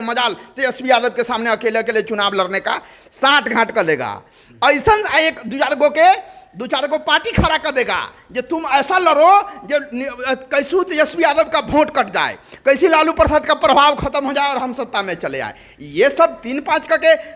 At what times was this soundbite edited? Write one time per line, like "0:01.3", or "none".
none